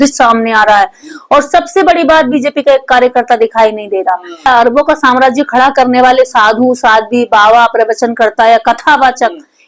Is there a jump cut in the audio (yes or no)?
yes